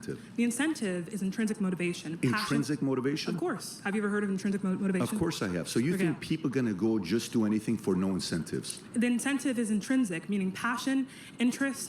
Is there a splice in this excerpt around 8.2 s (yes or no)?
no